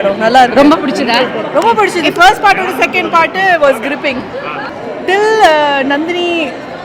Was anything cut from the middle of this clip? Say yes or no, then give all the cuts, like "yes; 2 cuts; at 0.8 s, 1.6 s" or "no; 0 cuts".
yes; 1 cut; at 4.7 s